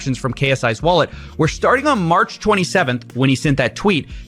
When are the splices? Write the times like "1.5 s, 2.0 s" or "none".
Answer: none

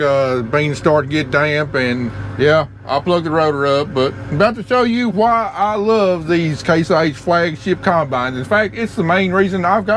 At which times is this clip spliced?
2.2 s

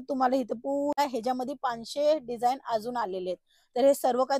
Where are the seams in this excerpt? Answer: 1.0 s

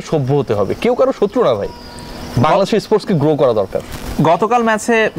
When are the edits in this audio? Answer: none

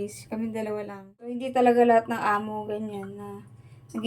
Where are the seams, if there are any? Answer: 1.4 s

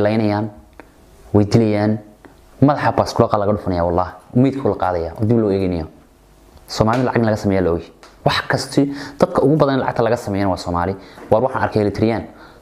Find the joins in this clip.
none

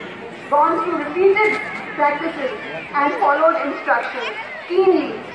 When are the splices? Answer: 4.1 s

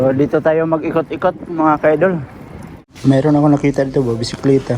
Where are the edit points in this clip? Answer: 3.0 s

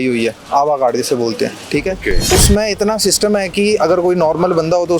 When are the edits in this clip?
2.2 s

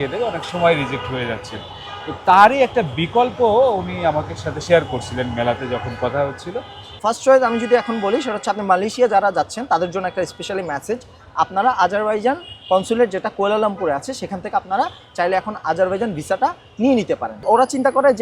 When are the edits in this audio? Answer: 7.0 s, 17.4 s

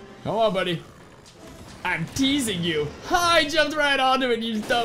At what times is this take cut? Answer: none

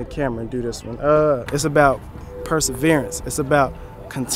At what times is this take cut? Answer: 1.4 s

